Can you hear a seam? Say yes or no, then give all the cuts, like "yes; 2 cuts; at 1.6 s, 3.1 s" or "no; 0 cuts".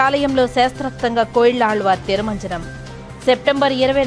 no; 0 cuts